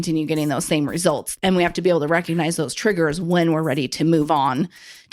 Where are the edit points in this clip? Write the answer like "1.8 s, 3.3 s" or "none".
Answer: 1.3 s